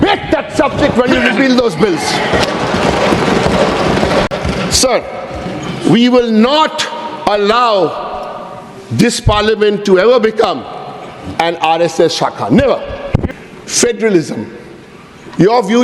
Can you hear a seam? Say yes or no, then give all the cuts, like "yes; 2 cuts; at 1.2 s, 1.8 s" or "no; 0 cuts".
yes; 2 cuts; at 4.3 s, 13.3 s